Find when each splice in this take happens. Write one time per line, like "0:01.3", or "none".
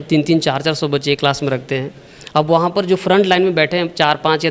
none